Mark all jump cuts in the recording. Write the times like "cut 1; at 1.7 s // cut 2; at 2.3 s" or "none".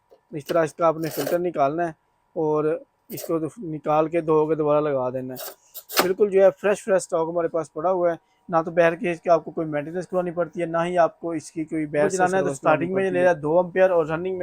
cut 1; at 12.1 s